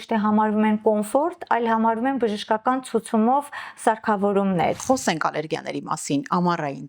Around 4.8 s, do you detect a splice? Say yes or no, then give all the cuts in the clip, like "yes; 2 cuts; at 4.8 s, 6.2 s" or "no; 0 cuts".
yes; 1 cut; at 4.8 s